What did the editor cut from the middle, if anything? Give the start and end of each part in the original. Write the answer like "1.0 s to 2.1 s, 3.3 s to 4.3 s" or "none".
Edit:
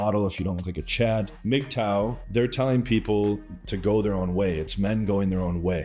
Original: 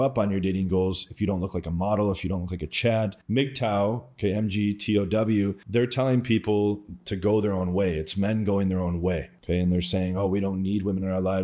4.1 s to 5.6 s